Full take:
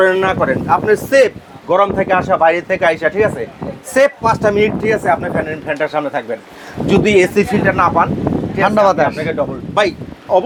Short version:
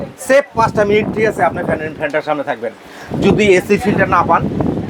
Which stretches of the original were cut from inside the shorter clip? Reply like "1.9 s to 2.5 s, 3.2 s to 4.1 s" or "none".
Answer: none